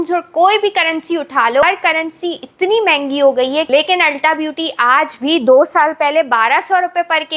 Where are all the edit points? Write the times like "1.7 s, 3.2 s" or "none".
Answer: 1.6 s, 3.7 s